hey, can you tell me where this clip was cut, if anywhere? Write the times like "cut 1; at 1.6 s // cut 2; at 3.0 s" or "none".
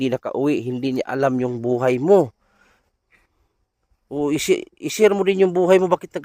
none